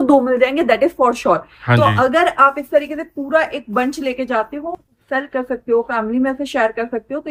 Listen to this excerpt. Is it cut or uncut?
uncut